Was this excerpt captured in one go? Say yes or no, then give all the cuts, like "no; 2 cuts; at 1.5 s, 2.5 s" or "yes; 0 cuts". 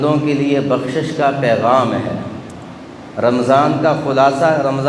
yes; 0 cuts